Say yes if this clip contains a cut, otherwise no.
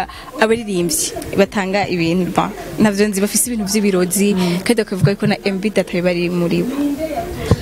no